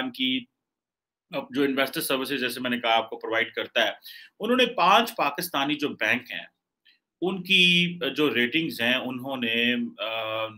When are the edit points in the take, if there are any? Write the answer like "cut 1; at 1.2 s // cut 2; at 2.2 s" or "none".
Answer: none